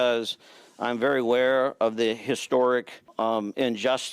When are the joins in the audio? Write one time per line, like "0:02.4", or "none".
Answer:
0:03.0